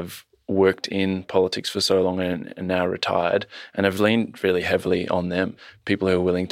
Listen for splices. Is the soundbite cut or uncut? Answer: cut